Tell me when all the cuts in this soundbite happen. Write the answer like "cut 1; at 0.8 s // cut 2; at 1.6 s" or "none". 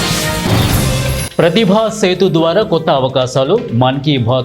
cut 1; at 1.2 s